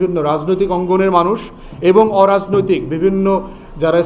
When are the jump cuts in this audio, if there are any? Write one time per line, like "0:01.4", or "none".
none

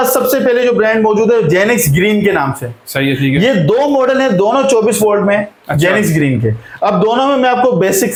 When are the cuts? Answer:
none

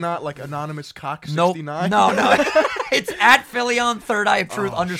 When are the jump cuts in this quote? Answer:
none

